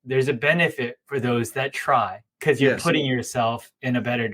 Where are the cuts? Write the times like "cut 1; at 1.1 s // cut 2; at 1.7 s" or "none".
cut 1; at 2.3 s